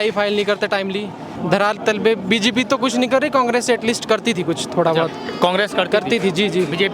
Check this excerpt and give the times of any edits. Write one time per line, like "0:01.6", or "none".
0:01.3